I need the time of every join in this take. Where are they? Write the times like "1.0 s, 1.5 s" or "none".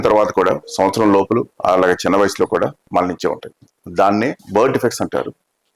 2.8 s